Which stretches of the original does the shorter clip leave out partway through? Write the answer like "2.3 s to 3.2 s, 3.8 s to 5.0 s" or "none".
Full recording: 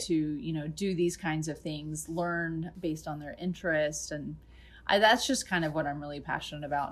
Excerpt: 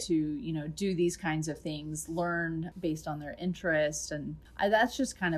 4.4 s to 4.7 s